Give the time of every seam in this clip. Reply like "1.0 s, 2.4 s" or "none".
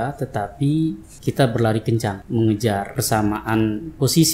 1.1 s, 2.2 s, 2.9 s